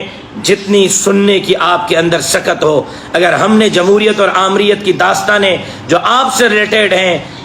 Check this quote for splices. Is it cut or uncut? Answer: uncut